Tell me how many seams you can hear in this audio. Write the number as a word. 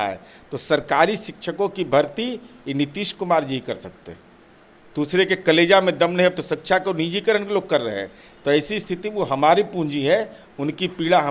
zero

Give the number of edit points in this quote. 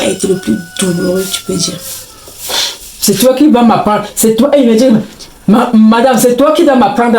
one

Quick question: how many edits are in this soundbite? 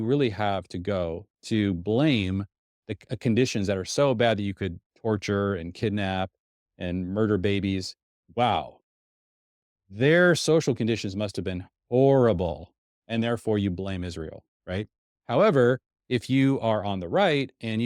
zero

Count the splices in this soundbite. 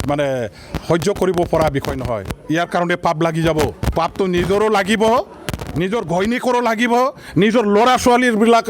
one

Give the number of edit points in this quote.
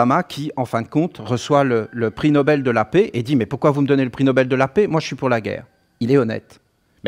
zero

